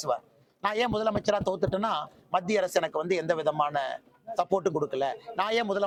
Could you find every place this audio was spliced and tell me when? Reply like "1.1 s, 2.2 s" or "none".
none

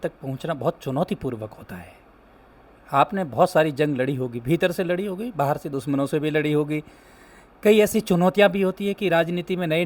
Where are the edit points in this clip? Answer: none

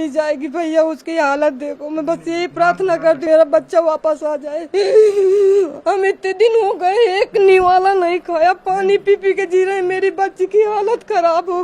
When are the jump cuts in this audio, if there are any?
3.2 s

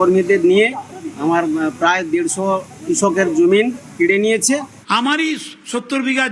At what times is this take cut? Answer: 4.8 s

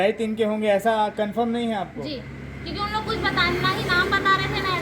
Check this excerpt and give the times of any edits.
none

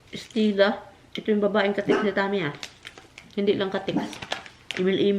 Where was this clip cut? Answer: none

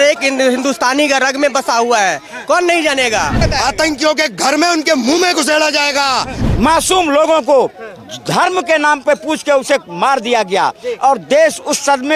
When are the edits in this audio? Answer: 3.4 s, 6.4 s

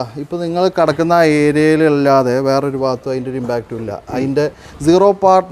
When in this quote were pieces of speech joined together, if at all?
none

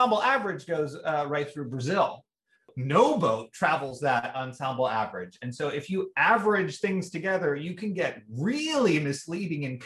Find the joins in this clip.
2.7 s

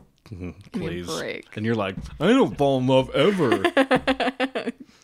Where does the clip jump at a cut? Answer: none

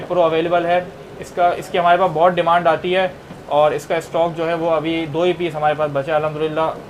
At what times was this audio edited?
none

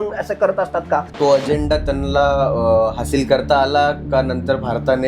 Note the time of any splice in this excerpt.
1.1 s

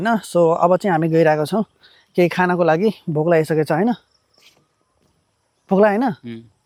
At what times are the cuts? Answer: none

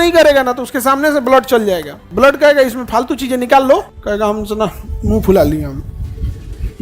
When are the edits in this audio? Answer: 2.0 s, 3.9 s

